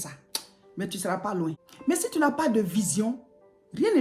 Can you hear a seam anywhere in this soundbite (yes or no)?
yes